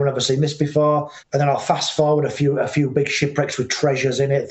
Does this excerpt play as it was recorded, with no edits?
yes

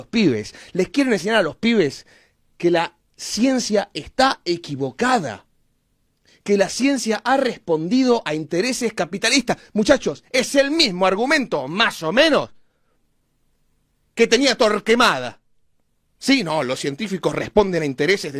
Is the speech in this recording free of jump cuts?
yes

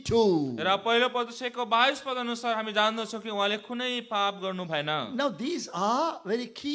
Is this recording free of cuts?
yes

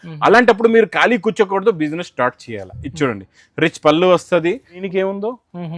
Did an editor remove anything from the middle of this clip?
yes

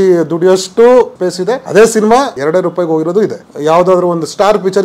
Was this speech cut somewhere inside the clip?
yes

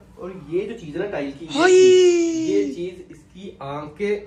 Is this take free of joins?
yes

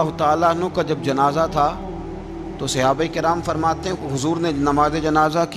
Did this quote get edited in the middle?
no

